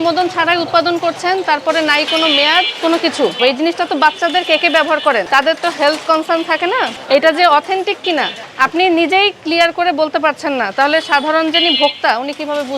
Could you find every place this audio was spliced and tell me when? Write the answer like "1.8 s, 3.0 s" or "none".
3.4 s, 5.3 s, 7.0 s, 8.4 s